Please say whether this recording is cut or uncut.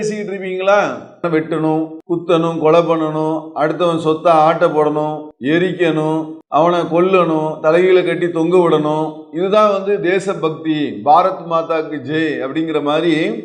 cut